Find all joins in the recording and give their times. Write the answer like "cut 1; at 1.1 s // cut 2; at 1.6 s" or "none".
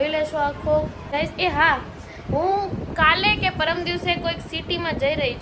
cut 1; at 1.1 s